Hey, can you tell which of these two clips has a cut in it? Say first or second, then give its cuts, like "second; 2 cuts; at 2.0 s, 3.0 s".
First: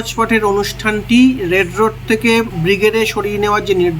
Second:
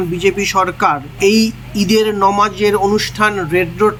first; 1 cut; at 2.5 s